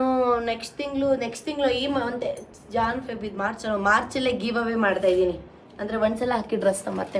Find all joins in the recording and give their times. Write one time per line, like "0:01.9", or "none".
none